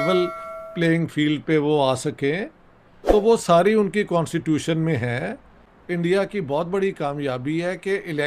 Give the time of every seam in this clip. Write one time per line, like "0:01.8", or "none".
0:05.6